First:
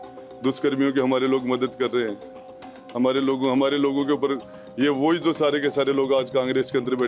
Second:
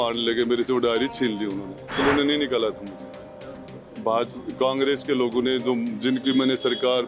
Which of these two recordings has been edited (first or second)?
second